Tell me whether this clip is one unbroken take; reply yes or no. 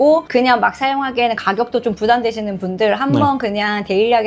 yes